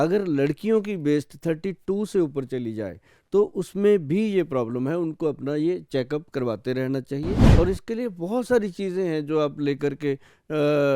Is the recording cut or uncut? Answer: cut